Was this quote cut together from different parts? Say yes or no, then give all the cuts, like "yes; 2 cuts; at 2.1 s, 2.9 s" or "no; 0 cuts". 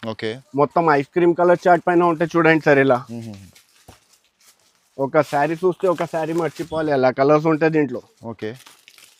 no; 0 cuts